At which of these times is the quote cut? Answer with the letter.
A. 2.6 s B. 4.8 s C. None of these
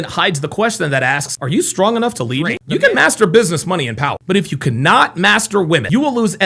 A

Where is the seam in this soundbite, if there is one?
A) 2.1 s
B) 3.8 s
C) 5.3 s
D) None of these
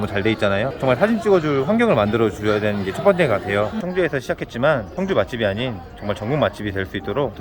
B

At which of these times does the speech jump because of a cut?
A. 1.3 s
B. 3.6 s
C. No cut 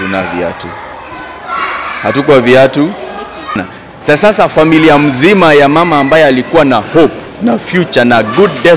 B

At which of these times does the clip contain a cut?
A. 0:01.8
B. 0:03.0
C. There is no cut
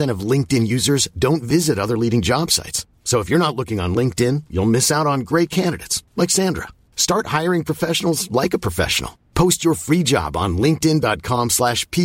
C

